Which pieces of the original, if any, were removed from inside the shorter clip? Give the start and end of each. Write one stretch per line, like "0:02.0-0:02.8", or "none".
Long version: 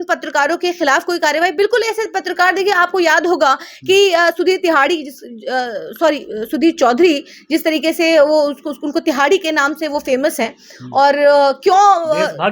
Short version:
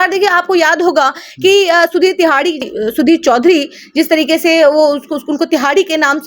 0:05.2-0:06.3